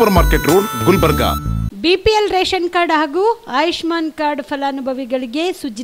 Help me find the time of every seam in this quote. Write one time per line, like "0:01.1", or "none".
0:01.7